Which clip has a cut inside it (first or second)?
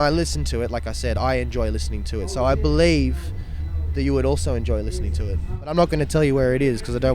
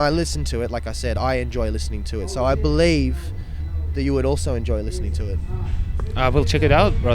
first